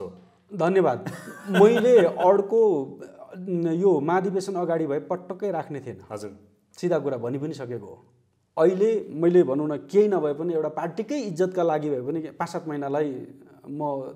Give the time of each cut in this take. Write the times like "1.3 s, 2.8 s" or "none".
none

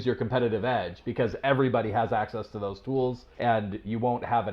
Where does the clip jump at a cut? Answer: 3.3 s

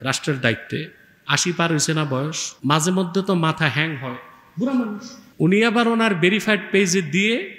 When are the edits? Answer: 2.5 s, 5.2 s

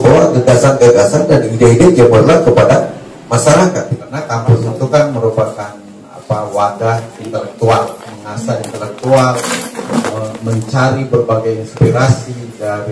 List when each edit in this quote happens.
4.1 s

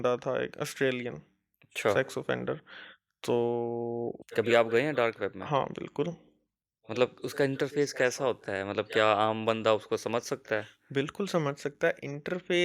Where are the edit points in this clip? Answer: 4.2 s

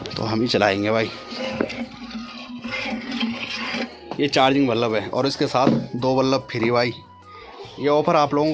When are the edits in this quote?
1.9 s, 3.8 s

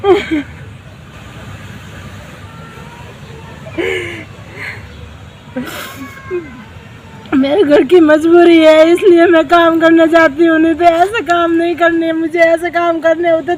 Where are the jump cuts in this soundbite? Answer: none

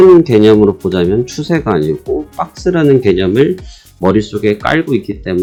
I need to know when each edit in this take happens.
none

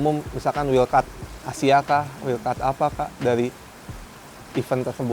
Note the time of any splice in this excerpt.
none

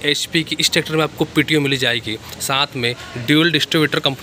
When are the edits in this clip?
none

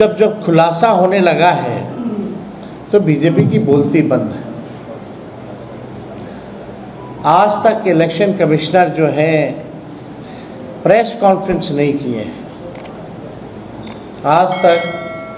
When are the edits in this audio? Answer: none

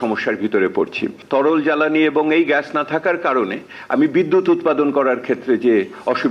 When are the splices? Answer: 1.2 s

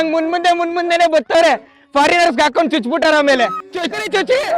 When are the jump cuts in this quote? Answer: 3.6 s

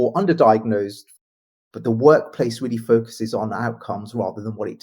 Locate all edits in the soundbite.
1.1 s

